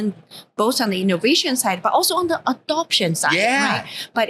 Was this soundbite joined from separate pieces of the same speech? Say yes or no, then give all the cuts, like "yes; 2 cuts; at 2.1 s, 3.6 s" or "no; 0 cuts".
no; 0 cuts